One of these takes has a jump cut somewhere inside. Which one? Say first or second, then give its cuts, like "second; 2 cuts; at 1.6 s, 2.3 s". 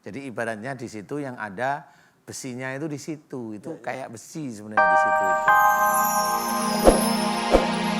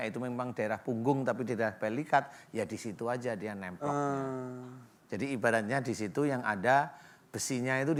first; 1 cut; at 4.7 s